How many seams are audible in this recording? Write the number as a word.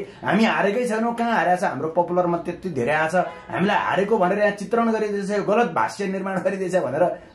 zero